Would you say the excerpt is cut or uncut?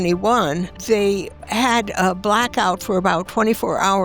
cut